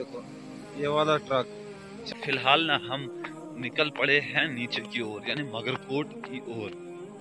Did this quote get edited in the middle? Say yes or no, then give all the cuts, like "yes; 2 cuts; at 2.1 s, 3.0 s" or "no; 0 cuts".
yes; 1 cut; at 2.0 s